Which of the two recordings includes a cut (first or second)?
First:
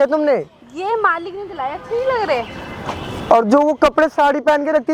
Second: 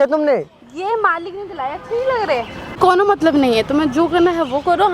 second